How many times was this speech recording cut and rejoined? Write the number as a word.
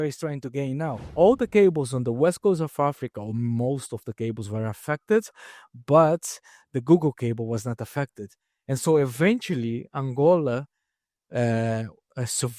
one